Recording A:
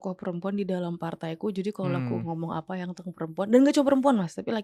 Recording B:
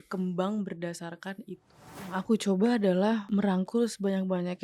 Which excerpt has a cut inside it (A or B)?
B